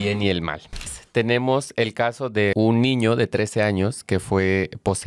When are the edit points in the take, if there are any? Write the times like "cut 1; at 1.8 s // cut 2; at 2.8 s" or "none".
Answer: cut 1; at 1.0 s // cut 2; at 2.5 s